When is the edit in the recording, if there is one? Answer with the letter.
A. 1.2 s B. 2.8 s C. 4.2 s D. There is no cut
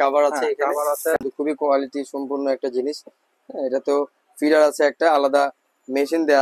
A